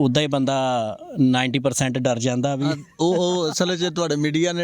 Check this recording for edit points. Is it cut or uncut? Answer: uncut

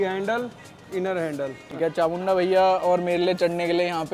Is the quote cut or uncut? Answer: cut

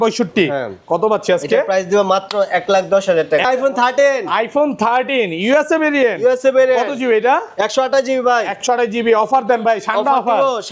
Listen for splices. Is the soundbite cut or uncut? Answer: cut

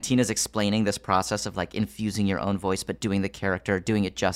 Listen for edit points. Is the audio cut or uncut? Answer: uncut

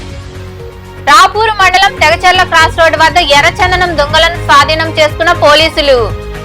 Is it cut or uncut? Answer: cut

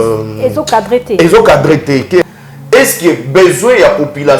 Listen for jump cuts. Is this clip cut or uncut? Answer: cut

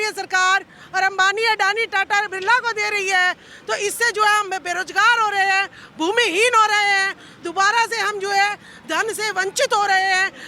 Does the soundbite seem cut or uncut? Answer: uncut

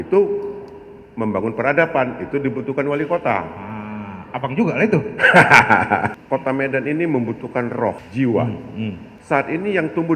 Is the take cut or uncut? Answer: cut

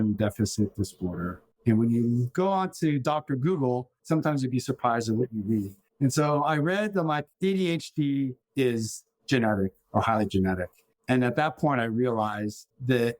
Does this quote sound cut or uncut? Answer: uncut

